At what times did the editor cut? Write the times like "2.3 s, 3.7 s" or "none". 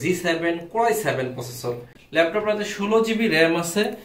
1.9 s